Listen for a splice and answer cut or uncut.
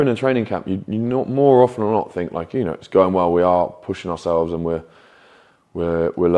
uncut